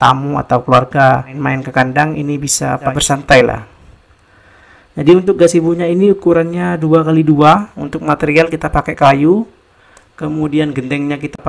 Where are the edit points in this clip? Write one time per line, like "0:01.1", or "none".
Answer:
0:01.3
0:02.9